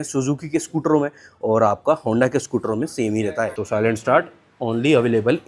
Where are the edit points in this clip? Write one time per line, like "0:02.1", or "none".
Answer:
0:03.6